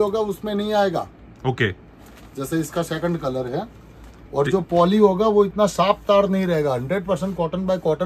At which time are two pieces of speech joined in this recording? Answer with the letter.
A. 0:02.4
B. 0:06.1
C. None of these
C